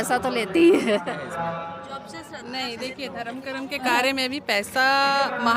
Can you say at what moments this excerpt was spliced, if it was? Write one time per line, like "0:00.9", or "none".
0:01.0